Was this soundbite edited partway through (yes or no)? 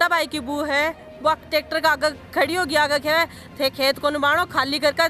no